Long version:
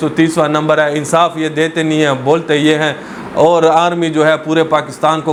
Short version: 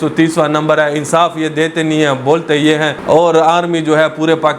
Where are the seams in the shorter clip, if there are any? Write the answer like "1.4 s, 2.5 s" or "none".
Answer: 3.0 s